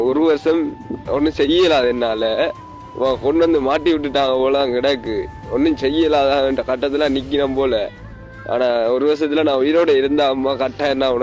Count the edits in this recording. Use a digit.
0